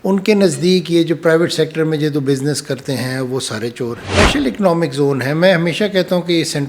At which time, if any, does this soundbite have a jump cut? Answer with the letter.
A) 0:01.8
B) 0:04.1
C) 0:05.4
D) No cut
B